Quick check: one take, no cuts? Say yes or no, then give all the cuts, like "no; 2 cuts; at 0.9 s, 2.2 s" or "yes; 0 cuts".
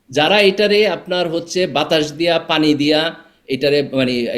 yes; 0 cuts